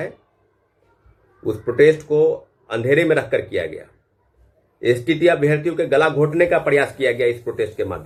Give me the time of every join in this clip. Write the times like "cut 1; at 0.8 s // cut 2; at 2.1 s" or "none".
none

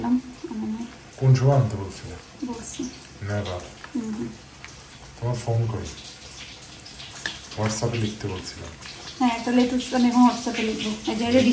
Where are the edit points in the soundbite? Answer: none

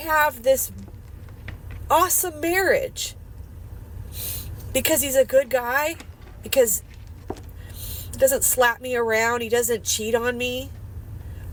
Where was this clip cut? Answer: none

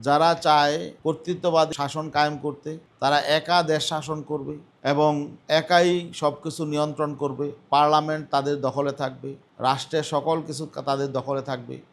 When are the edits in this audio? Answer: cut 1; at 1.7 s

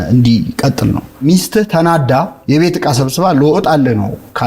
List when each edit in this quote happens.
cut 1; at 1.2 s // cut 2; at 2.3 s

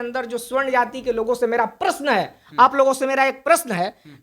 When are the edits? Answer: none

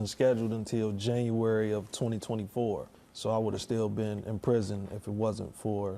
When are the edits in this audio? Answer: cut 1; at 2.8 s

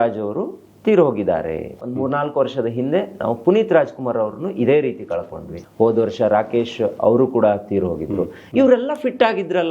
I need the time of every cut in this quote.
cut 1; at 1.8 s // cut 2; at 5.6 s // cut 3; at 8.4 s

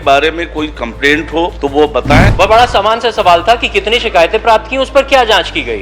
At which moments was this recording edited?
cut 1; at 1.9 s

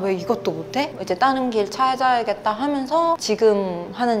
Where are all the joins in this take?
cut 1; at 1.0 s

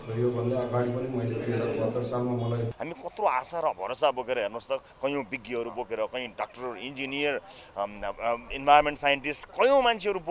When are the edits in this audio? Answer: cut 1; at 2.8 s

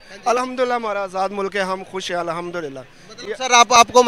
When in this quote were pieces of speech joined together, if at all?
none

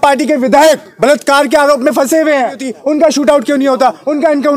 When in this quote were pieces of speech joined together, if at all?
cut 1; at 2.7 s

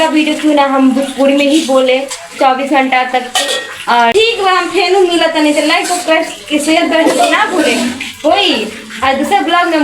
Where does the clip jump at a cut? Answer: cut 1; at 4.1 s

